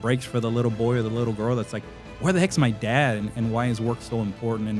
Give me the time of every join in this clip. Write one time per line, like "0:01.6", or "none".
none